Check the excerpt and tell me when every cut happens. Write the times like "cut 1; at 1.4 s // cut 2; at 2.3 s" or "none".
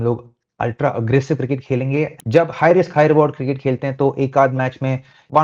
cut 1; at 2.2 s